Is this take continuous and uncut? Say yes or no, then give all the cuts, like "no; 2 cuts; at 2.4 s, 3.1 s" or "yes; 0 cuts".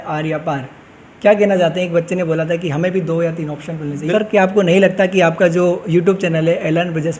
no; 1 cut; at 4.0 s